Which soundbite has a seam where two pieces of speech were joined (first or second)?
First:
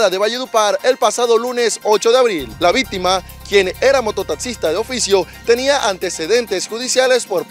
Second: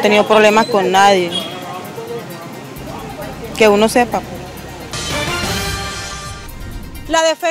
second